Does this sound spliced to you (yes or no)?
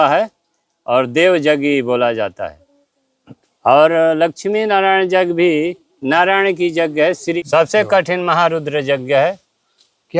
yes